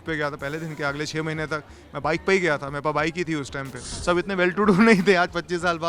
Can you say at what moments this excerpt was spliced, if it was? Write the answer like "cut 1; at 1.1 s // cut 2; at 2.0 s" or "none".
cut 1; at 3.9 s